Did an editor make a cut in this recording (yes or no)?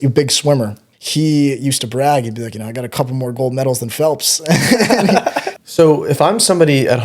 yes